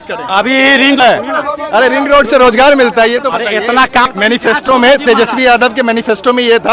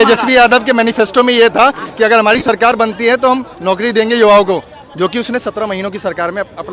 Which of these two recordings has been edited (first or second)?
first